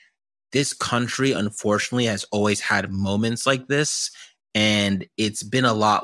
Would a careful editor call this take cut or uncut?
uncut